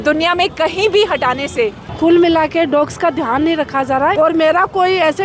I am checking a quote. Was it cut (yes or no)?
yes